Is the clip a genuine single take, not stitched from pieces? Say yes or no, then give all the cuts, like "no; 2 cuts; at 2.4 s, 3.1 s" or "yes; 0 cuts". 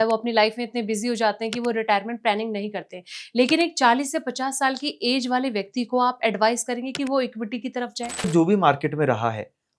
no; 1 cut; at 8.3 s